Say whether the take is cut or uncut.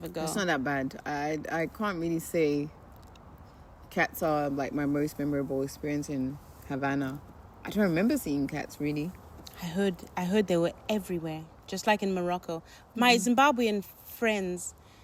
uncut